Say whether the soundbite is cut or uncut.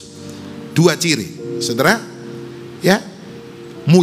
uncut